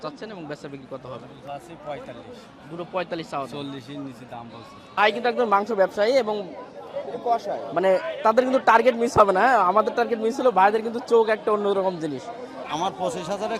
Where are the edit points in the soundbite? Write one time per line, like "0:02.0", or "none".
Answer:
0:05.0
0:12.6